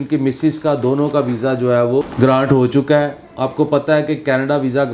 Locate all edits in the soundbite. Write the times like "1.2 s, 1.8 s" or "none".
2.1 s